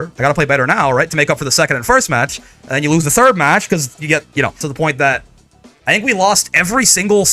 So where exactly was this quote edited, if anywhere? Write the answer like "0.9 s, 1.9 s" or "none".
4.6 s